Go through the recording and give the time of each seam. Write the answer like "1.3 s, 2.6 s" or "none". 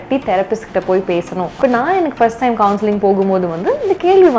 1.5 s